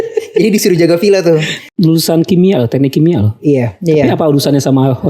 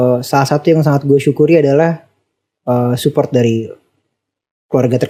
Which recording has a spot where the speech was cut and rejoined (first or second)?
first